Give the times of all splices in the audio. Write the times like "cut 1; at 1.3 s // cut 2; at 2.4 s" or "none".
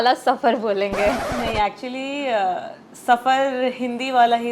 none